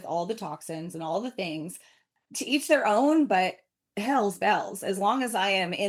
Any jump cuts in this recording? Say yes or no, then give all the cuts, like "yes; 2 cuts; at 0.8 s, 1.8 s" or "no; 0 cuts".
no; 0 cuts